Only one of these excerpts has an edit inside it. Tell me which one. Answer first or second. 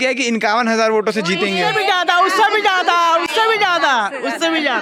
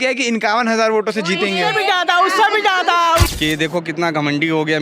second